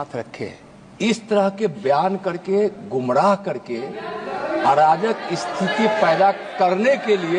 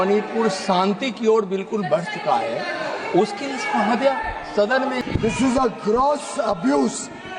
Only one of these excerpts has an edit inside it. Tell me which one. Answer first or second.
second